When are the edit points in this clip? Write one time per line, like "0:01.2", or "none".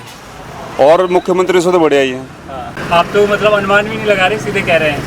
0:02.8

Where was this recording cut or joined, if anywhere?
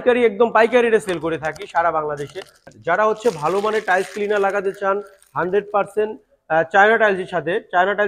0:02.7

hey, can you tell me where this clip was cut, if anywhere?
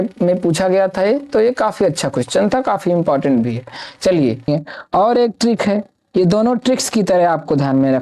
0:04.5

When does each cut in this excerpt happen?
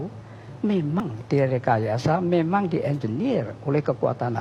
0:01.0

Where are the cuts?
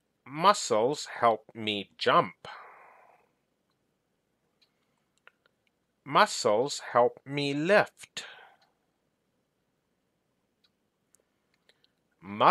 0:04.2
0:10.1

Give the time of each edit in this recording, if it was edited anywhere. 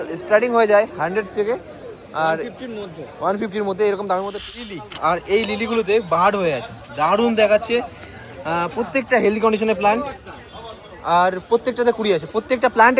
0:04.4

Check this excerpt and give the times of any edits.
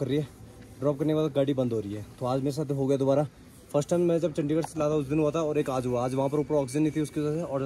none

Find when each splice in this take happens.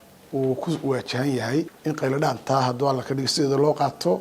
0:01.7

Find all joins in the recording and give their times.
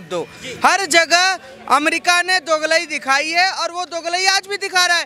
none

